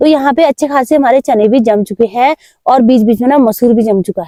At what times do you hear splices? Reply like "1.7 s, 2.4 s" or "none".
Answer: none

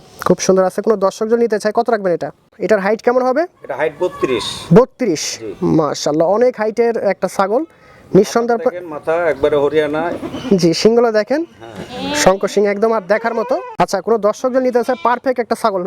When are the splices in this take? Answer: 2.5 s, 13.7 s

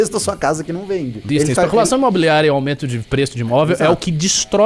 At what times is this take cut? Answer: 1.3 s

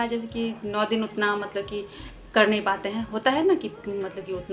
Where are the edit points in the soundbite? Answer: none

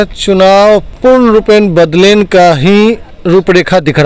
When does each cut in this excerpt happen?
0.9 s, 3.1 s

